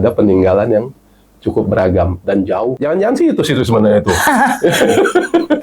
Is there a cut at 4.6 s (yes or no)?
no